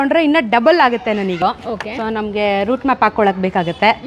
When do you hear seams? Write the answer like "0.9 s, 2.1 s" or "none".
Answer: 1.4 s